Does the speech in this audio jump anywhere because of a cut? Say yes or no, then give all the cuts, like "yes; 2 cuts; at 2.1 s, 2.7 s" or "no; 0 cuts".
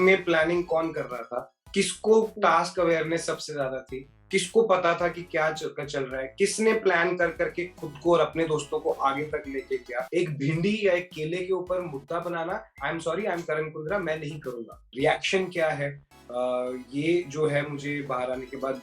yes; 2 cuts; at 10.0 s, 14.9 s